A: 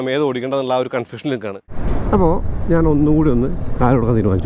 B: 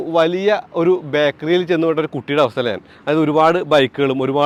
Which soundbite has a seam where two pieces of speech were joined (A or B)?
A